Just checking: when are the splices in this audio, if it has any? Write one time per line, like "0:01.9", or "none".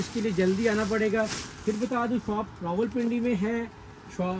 none